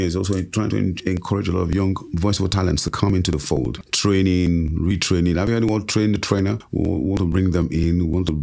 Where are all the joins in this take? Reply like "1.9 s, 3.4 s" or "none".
2.1 s, 3.8 s, 6.6 s